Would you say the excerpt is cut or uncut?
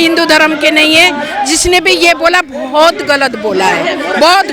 uncut